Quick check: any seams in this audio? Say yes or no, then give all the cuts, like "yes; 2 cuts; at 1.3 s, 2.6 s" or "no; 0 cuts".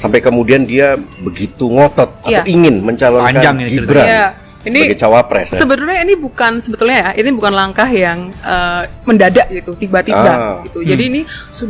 yes; 2 cuts; at 2.2 s, 5.5 s